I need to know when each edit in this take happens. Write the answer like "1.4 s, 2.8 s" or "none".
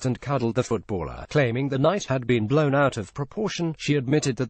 3.6 s